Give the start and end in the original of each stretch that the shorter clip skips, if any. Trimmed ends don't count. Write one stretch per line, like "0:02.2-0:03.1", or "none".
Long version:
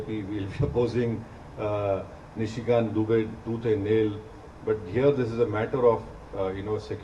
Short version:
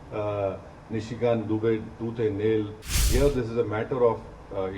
0:04.5-0:04.9